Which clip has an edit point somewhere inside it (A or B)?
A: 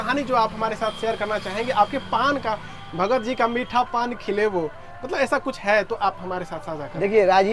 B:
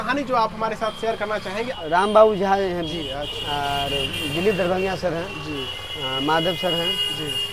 B